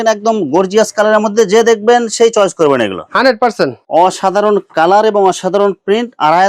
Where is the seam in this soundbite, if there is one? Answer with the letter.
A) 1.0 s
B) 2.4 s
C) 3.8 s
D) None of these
C